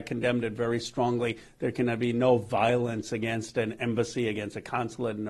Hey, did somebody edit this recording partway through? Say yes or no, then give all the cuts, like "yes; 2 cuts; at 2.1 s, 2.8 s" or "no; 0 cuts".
no; 0 cuts